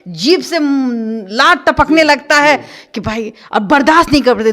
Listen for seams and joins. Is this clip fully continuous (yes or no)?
yes